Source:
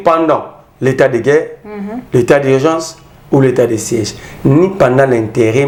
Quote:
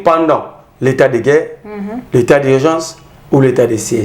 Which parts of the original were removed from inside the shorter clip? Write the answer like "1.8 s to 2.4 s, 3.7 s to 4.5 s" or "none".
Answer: none